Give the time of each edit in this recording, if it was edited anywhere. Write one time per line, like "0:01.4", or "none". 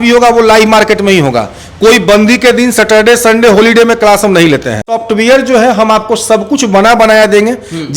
0:04.9